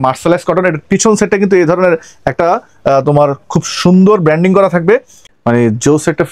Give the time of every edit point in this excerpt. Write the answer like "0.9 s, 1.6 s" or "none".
5.2 s